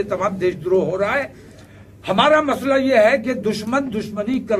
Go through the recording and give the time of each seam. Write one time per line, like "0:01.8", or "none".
none